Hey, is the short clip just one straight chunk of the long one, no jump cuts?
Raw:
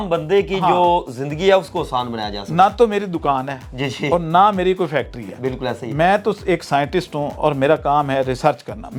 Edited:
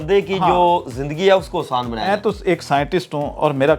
no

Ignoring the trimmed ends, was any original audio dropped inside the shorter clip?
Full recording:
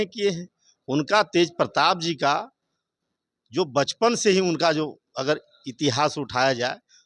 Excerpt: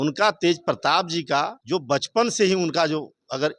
yes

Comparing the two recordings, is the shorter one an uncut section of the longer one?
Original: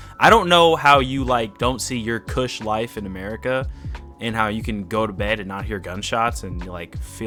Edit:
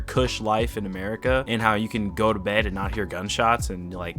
no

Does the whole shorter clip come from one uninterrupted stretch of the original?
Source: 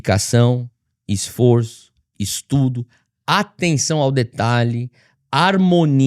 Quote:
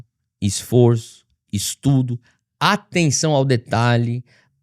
yes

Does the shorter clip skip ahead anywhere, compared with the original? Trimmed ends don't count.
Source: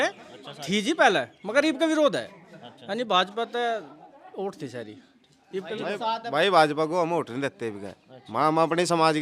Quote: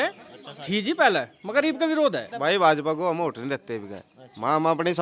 yes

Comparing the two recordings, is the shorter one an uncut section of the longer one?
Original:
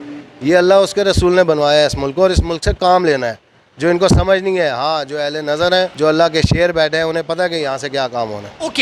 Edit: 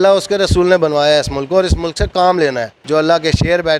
no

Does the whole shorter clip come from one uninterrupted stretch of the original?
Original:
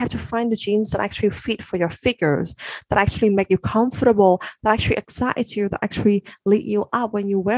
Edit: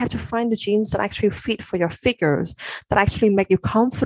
yes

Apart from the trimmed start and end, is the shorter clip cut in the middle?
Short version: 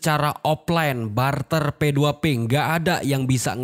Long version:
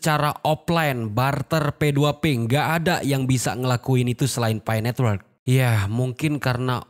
no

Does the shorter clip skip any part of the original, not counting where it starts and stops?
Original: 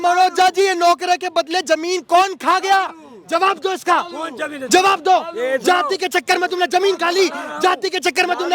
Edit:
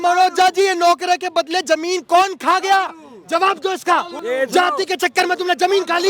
yes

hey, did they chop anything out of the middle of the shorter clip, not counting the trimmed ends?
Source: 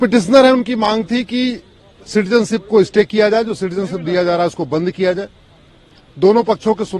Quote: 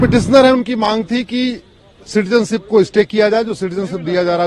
no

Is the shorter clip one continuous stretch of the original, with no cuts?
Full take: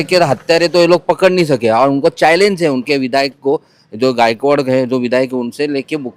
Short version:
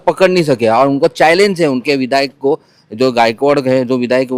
yes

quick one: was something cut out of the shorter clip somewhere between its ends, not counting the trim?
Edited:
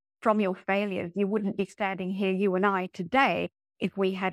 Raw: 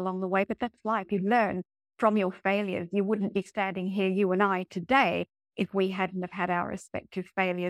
no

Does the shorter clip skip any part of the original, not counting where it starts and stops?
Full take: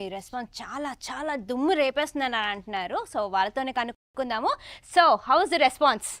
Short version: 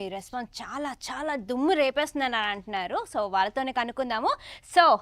yes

